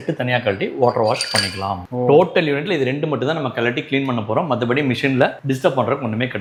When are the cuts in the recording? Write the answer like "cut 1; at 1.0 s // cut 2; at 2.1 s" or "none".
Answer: none

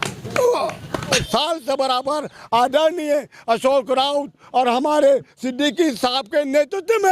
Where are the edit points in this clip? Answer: cut 1; at 1.2 s

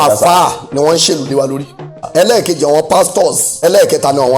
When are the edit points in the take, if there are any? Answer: cut 1; at 2.1 s // cut 2; at 3.6 s

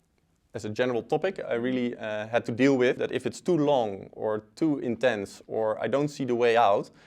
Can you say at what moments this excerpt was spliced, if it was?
cut 1; at 3.0 s

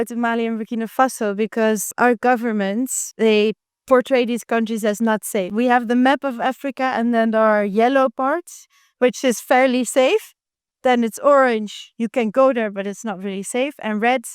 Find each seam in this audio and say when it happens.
cut 1; at 1.9 s // cut 2; at 3.0 s // cut 3; at 5.5 s

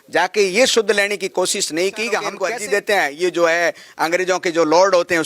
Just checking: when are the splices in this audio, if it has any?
cut 1; at 2.3 s

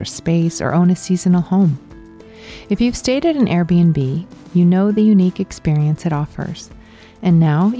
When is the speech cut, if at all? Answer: none

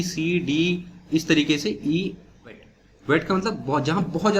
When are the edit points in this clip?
cut 1; at 2.7 s

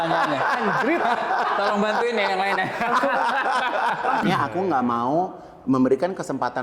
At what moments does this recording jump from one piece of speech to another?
cut 1; at 4.2 s

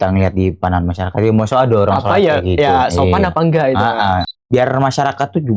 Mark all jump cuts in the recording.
cut 1; at 4.3 s

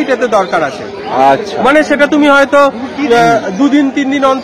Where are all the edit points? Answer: none

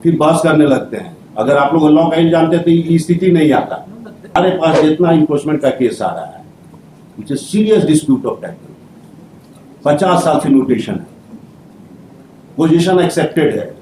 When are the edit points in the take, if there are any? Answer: cut 1; at 4.3 s

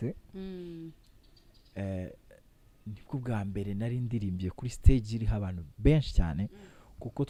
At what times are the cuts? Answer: none

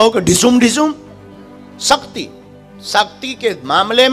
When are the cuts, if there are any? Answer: none

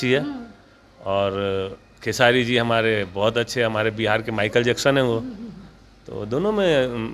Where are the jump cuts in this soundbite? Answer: none

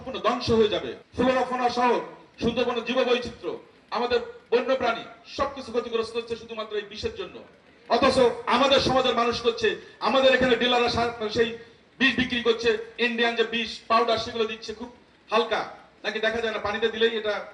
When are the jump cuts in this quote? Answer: cut 1; at 1.0 s

